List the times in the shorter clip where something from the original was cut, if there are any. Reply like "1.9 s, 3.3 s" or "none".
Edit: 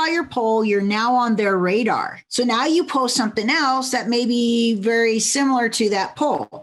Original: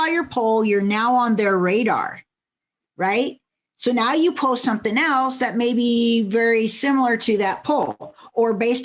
2.2 s